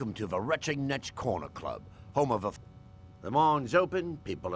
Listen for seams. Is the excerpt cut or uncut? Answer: cut